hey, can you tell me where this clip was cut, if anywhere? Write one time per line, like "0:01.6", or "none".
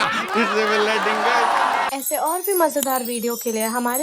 0:01.9